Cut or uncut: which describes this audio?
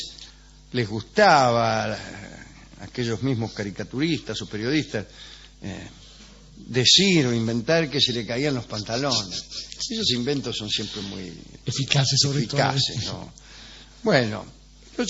uncut